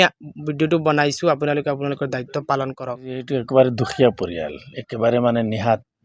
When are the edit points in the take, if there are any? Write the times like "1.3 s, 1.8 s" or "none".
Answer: 3.3 s